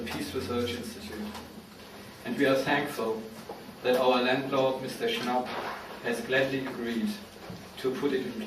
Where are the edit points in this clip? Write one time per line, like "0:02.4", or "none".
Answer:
0:04.6